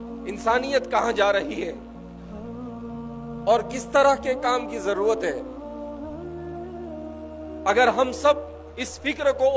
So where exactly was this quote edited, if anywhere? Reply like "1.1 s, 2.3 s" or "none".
1.8 s, 3.1 s, 5.4 s, 7.6 s